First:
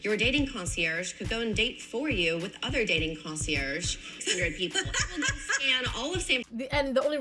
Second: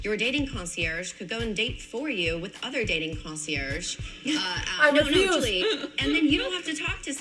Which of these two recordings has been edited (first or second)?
first